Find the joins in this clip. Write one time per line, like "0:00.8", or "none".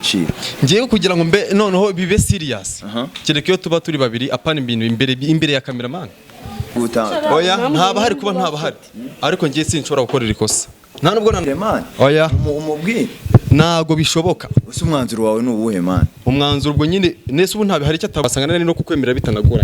0:06.8
0:11.4
0:18.2